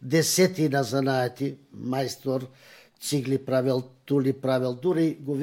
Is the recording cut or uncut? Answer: uncut